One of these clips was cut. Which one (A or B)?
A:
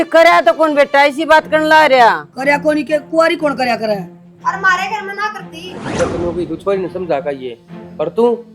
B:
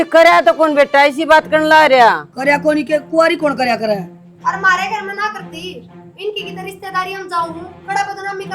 A